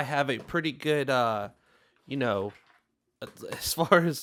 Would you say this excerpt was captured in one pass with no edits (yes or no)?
yes